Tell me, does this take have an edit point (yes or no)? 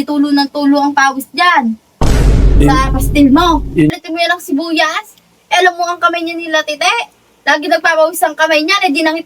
yes